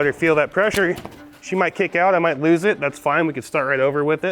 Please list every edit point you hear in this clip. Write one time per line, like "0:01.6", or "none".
none